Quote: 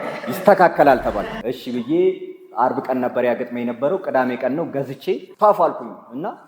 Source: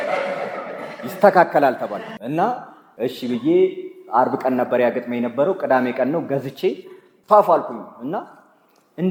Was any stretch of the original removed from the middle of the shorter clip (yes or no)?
yes